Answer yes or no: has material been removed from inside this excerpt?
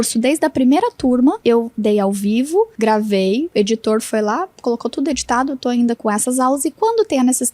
yes